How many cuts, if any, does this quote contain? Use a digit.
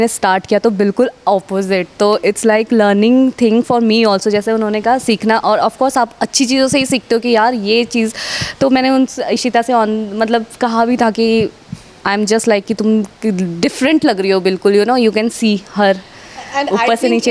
0